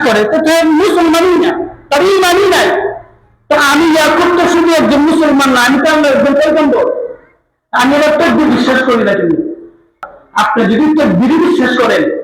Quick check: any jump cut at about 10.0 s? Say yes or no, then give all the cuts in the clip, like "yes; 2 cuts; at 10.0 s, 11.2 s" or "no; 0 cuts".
yes; 1 cut; at 10.0 s